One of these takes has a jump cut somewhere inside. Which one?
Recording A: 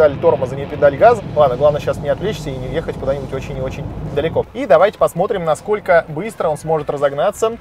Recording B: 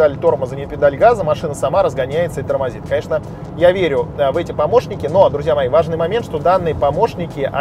A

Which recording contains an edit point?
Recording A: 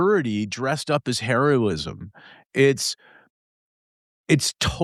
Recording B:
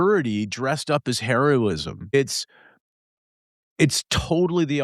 B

